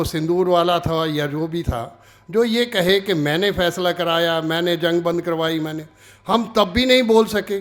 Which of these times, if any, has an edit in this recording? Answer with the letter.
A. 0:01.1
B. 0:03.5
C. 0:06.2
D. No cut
D